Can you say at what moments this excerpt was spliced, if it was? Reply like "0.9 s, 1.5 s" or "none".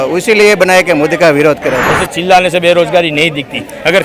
1.8 s